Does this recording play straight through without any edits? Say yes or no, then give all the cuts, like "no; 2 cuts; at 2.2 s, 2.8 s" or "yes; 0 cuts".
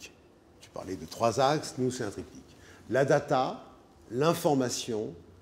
yes; 0 cuts